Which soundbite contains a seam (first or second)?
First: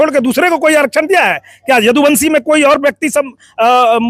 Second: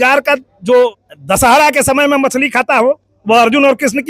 second